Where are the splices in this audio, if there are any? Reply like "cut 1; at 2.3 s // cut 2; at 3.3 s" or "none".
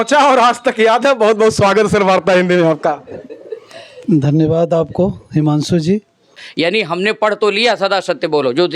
cut 1; at 6.4 s